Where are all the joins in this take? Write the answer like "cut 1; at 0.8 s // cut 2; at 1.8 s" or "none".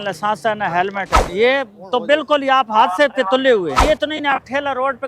cut 1; at 1.2 s // cut 2; at 3.8 s